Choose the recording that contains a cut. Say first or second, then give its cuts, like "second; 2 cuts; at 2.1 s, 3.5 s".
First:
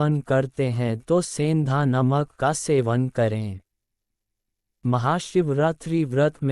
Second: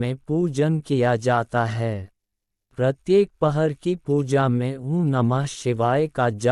first; 1 cut; at 4.7 s